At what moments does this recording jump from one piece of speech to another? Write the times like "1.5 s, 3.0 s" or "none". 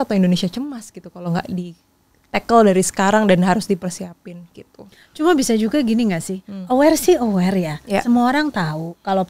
none

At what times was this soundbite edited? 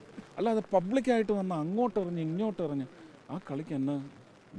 none

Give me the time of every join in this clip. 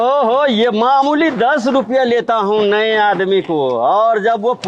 none

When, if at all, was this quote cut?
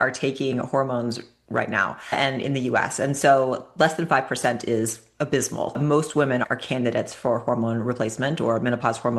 5.8 s

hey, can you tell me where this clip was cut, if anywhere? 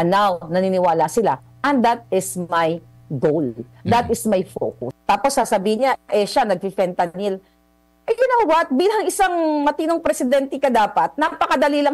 4.9 s

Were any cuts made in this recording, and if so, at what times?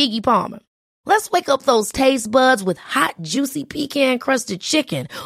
none

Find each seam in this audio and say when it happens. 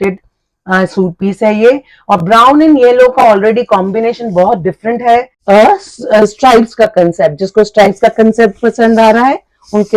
5.3 s

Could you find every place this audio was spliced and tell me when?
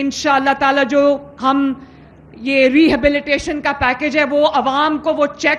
none

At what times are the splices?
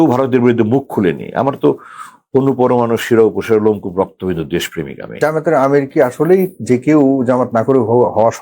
5.1 s

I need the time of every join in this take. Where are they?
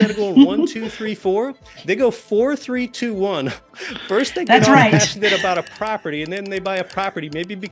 none

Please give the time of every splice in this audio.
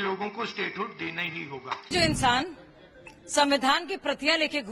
1.8 s

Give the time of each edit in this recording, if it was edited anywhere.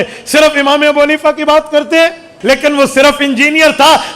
2.3 s

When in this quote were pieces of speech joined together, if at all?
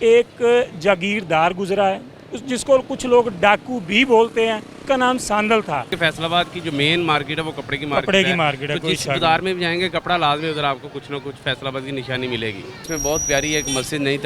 4.7 s, 5.9 s, 12.7 s

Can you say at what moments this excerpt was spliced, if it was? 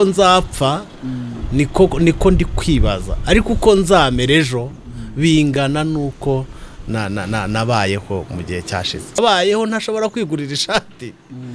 9.2 s

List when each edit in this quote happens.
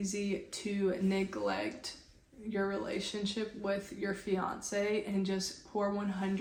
none

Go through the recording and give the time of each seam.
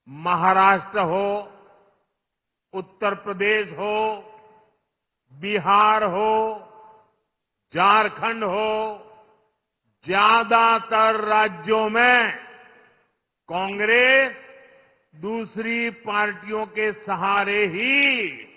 none

